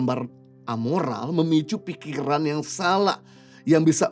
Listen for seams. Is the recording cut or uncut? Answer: uncut